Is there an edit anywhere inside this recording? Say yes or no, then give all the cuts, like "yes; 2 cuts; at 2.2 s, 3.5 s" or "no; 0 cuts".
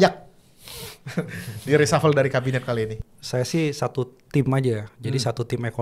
yes; 1 cut; at 3.0 s